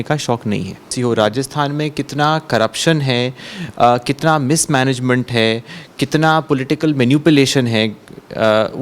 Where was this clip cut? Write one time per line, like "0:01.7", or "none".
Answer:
0:00.9